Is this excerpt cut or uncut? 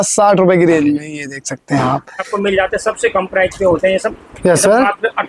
cut